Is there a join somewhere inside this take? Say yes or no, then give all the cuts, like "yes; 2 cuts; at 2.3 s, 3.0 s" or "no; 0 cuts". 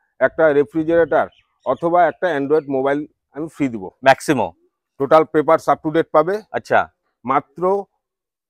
yes; 1 cut; at 3.9 s